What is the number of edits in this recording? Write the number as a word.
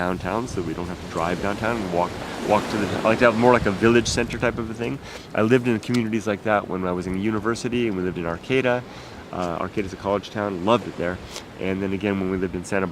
one